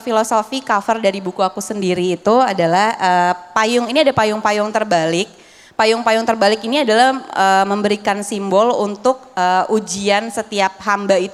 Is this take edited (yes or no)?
no